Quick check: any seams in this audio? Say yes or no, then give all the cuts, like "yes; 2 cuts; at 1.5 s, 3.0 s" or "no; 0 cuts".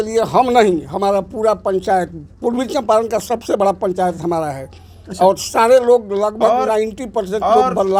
no; 0 cuts